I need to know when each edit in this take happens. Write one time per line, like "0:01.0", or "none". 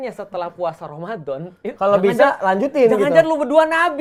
none